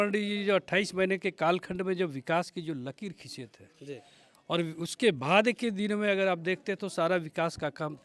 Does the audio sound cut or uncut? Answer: uncut